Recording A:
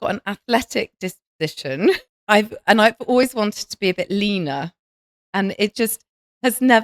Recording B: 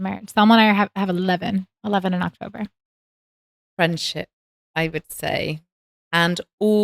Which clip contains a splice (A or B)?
A